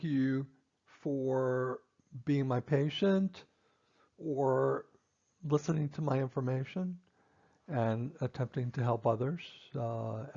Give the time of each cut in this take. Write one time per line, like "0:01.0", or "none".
0:01.2